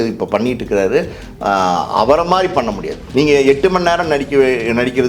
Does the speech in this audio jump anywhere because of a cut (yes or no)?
yes